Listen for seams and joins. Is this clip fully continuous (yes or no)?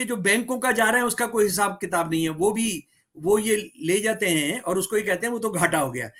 yes